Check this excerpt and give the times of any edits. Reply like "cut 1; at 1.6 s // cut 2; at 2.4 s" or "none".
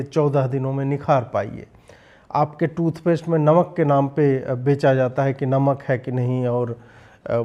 none